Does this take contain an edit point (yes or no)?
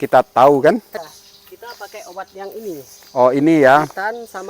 yes